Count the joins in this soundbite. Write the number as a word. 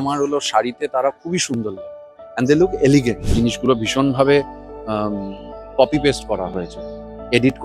one